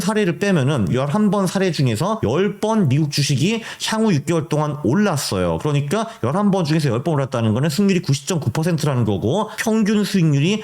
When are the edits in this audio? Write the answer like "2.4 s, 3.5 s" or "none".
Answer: 0.9 s, 2.2 s, 9.5 s